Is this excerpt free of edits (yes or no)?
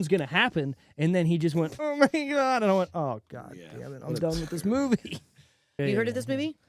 no